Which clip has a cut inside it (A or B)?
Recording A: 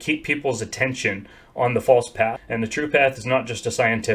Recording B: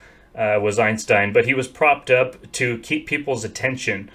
A